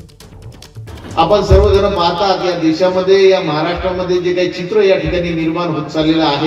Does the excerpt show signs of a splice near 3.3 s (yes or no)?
no